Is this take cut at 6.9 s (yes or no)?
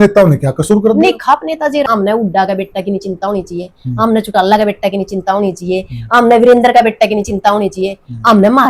no